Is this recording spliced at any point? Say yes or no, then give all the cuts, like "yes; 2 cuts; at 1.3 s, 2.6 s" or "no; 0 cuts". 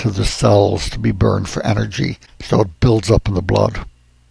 yes; 1 cut; at 2.3 s